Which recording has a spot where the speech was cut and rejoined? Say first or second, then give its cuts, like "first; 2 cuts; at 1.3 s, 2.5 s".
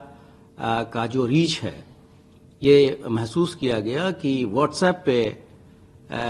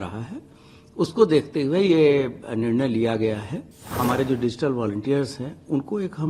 second; 1 cut; at 3.9 s